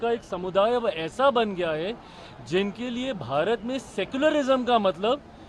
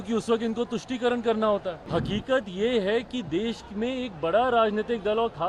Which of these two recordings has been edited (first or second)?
second